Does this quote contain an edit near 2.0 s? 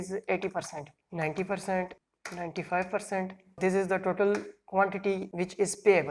yes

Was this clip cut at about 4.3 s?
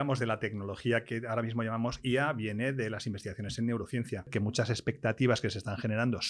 yes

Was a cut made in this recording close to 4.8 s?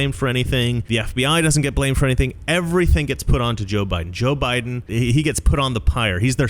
yes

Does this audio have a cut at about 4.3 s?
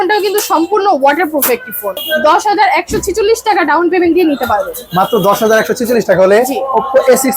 no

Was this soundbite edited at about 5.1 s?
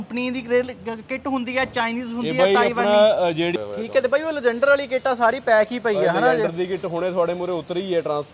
no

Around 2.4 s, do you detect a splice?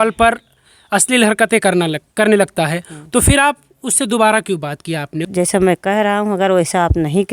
no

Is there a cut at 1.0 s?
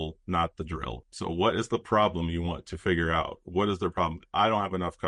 yes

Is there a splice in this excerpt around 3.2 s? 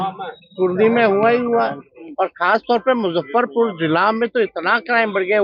no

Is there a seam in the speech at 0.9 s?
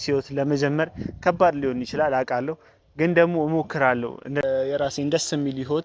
no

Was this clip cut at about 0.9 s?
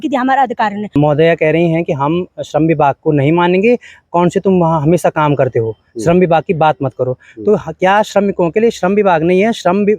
yes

